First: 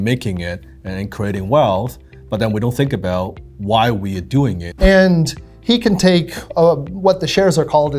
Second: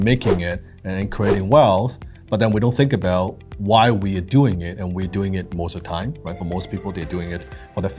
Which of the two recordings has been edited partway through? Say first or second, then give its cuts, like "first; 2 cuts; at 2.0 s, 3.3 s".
first; 1 cut; at 4.6 s